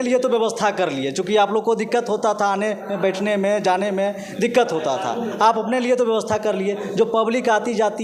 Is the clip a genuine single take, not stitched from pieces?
yes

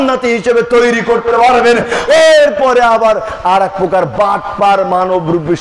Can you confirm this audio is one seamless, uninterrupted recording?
no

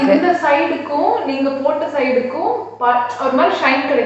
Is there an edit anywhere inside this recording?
no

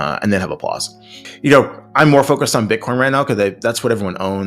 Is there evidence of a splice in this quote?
yes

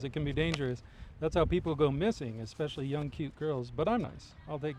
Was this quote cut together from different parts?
no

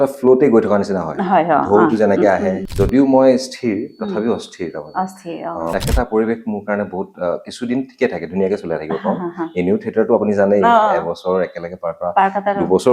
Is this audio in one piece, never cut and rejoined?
no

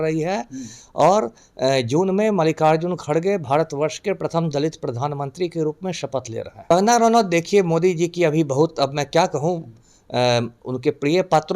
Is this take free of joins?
no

